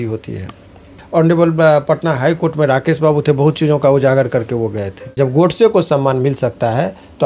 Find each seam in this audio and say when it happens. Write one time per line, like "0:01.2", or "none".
0:00.9
0:05.1

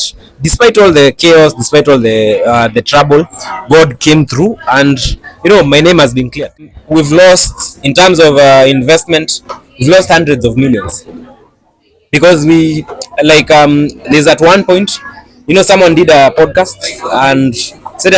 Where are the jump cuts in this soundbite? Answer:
0:06.8

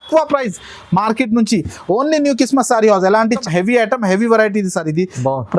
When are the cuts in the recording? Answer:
0:03.4

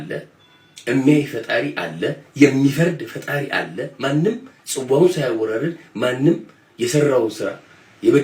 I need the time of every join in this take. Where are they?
none

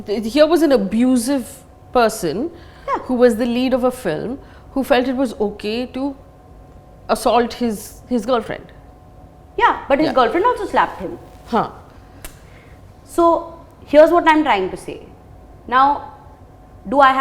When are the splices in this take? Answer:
none

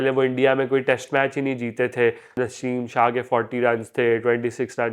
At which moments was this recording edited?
0:02.3

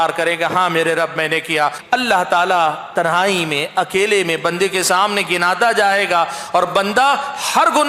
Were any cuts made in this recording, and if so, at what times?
0:01.8

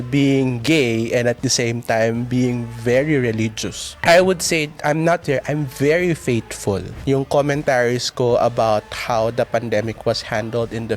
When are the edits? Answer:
0:03.9
0:06.9

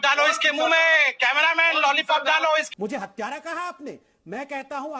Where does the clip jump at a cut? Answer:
0:02.2
0:02.7

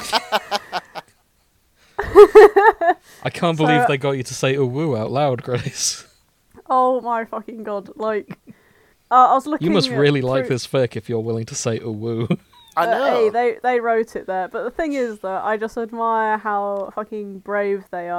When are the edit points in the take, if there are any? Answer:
none

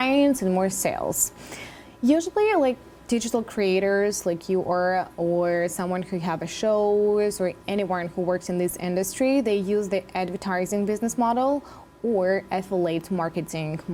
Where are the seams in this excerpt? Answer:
none

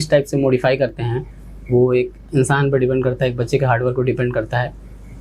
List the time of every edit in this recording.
none

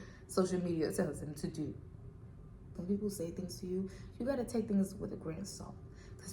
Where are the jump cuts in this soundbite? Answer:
0:02.7

